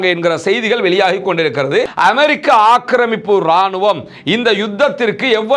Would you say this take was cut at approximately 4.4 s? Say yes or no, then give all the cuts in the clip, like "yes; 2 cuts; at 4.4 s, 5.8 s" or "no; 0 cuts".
no; 1 cut; at 1.9 s